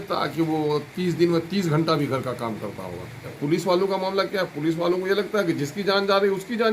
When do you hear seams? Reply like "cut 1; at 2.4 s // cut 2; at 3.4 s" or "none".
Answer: cut 1; at 3.4 s